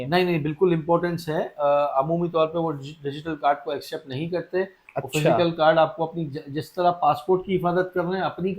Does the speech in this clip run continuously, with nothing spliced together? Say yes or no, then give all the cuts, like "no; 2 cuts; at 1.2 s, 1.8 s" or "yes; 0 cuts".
yes; 0 cuts